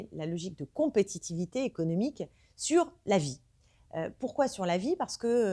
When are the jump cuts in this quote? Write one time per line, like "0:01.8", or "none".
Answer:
none